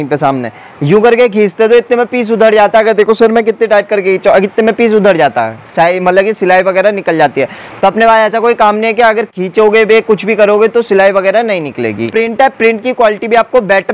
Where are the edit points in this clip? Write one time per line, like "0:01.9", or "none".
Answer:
0:12.1